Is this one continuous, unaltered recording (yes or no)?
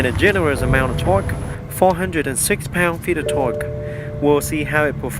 no